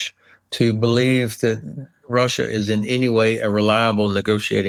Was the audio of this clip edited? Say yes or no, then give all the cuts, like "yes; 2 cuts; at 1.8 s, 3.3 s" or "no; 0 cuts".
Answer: no; 0 cuts